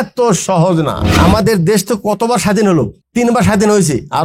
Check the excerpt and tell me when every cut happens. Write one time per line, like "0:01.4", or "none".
0:01.0
0:03.0